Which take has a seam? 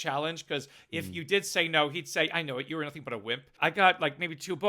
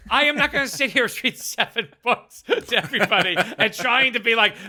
first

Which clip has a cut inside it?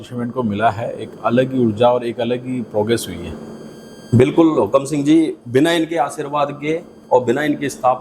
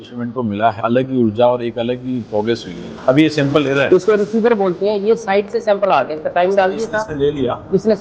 second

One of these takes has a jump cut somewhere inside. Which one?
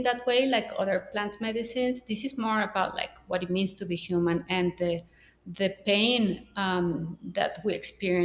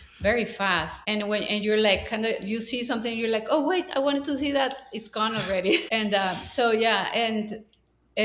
second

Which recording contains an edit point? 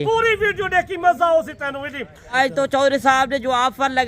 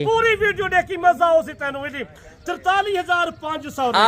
first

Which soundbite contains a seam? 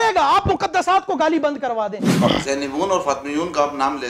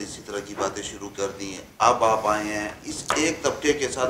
first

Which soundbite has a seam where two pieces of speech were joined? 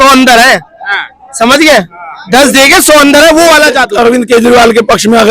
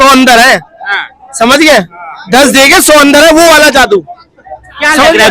first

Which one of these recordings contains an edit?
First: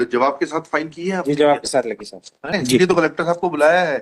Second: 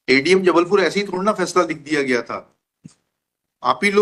first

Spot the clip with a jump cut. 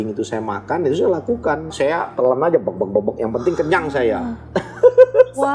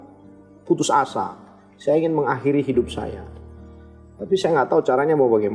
first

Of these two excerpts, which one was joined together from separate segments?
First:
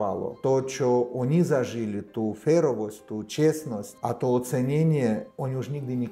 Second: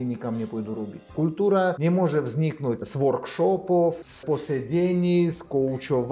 second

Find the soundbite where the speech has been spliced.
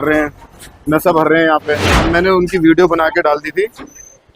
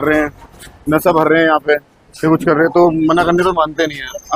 first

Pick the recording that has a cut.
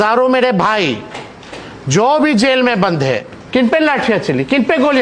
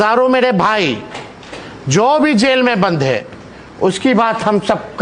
first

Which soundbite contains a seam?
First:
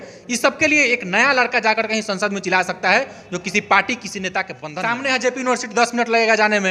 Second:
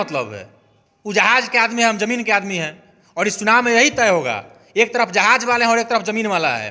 first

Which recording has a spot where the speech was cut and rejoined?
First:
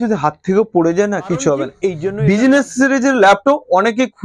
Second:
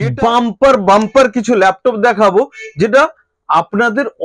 first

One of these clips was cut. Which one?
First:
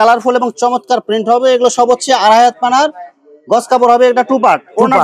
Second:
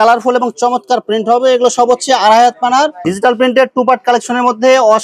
second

